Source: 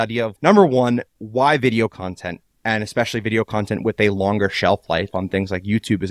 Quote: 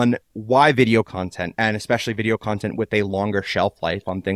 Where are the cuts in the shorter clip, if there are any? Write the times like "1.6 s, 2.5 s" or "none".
1.4 s